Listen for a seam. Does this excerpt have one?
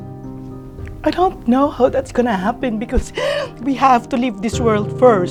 no; 0 cuts

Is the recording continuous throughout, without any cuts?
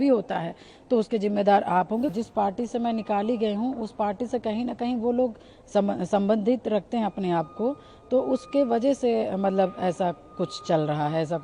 no; 1 cut; at 2.1 s

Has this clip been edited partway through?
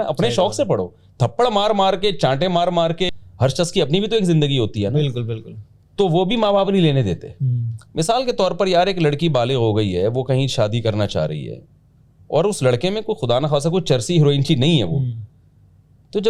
yes; 1 cut; at 3.1 s

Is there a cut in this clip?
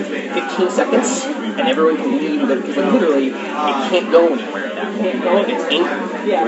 no; 0 cuts

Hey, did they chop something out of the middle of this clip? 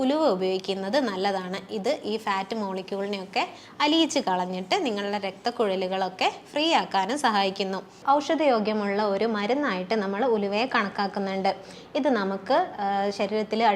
yes; 1 cut; at 7.9 s

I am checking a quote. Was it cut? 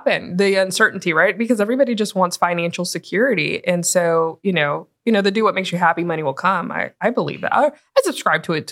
no; 0 cuts

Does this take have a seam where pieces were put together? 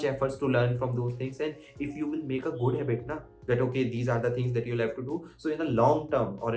no; 0 cuts

